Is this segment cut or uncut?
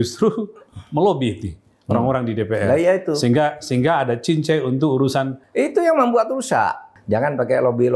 cut